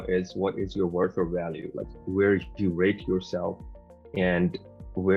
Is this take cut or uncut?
uncut